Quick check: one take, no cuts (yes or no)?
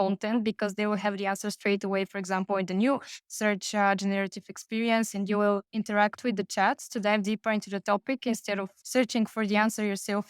yes